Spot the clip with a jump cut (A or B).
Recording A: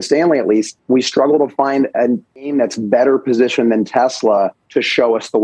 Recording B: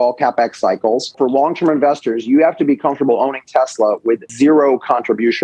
B